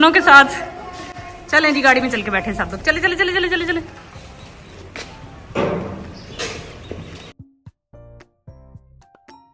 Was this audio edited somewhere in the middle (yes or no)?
no